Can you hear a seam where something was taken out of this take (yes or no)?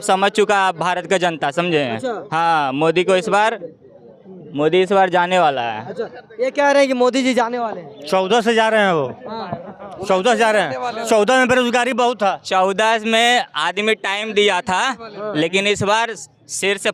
no